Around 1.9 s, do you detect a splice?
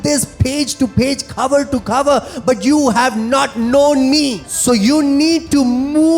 no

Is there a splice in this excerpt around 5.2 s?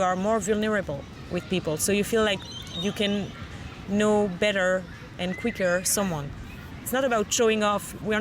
no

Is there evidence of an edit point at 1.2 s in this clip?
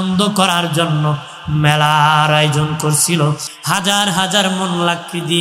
no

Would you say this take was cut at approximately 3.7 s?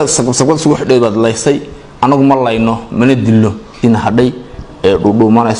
yes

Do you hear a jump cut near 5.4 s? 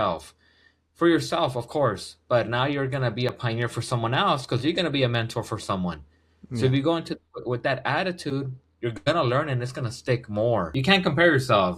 no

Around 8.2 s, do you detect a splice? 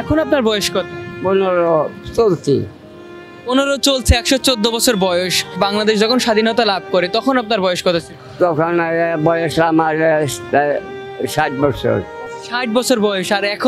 yes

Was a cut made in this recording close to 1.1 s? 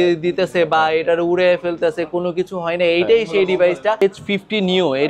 no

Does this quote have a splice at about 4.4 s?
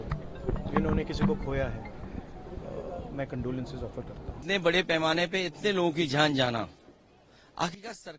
yes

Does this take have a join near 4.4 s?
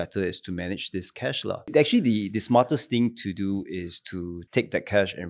yes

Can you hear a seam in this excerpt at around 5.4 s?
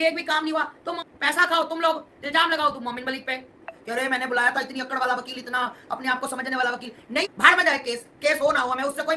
no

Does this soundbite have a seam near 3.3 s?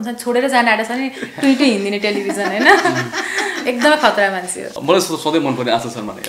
no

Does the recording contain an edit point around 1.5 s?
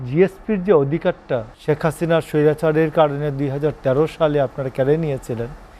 yes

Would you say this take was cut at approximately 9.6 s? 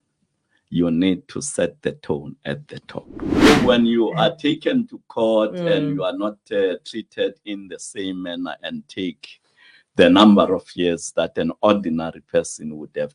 no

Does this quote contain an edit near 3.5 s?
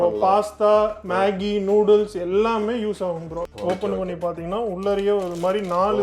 yes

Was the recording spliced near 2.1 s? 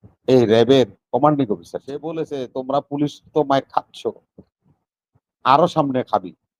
yes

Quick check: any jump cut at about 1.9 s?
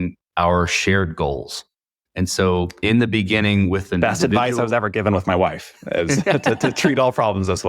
yes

